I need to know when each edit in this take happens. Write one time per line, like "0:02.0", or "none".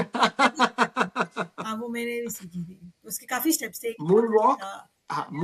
none